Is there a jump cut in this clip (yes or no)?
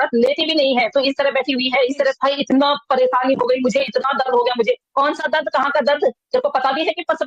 yes